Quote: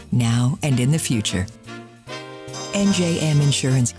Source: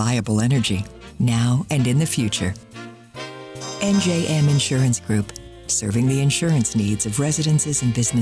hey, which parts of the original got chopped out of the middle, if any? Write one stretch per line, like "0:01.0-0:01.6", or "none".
none